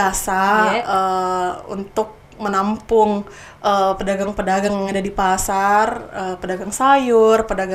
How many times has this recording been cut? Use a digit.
0